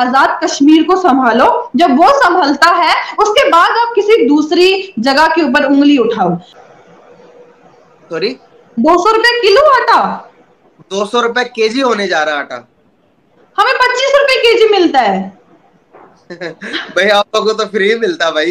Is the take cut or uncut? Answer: cut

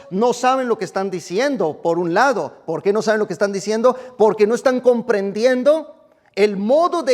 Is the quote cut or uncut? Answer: uncut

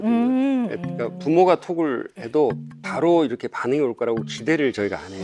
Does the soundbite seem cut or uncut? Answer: uncut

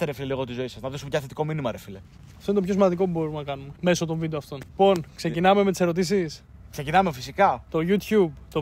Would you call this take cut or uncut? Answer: uncut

